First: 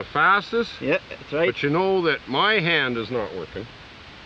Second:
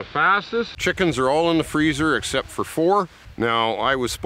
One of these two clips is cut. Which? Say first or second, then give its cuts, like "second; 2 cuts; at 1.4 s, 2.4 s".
second; 2 cuts; at 0.8 s, 3.2 s